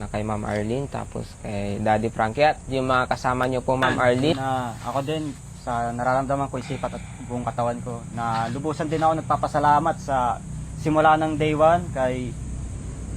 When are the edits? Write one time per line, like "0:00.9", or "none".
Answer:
0:04.3